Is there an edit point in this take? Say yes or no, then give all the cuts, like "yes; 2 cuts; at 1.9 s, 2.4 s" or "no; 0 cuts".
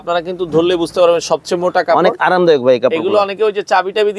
no; 0 cuts